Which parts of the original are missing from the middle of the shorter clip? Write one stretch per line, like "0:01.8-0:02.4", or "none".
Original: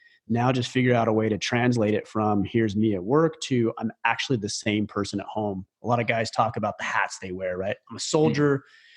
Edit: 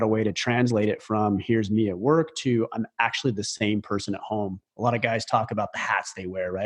none